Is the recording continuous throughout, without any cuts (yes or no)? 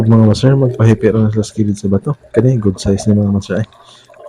yes